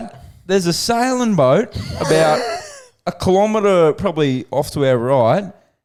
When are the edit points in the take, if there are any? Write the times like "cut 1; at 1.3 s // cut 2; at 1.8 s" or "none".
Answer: none